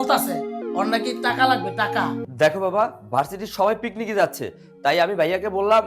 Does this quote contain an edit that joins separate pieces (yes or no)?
yes